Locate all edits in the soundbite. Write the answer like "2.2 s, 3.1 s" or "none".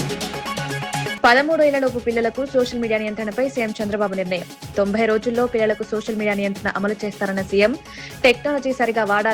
1.1 s